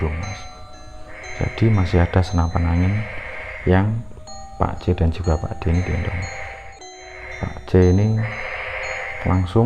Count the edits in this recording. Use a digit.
1